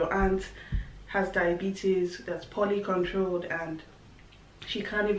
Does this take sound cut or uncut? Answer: uncut